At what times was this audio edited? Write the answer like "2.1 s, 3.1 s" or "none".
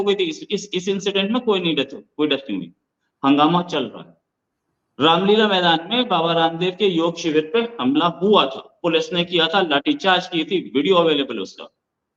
none